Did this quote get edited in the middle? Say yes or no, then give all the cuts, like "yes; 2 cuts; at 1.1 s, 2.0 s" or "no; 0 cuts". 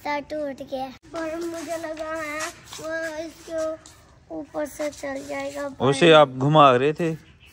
yes; 1 cut; at 1.0 s